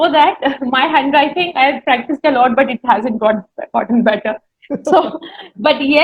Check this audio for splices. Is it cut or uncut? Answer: uncut